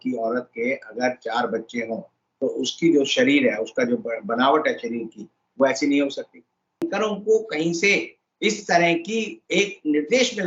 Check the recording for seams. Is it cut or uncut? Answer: cut